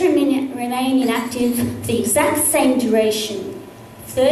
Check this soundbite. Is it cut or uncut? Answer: uncut